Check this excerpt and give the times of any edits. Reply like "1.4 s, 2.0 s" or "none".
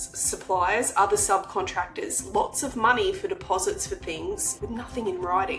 4.6 s